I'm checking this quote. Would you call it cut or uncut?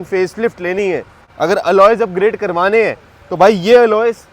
cut